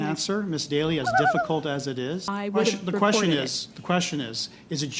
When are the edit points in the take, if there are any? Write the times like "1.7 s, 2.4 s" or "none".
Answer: 2.3 s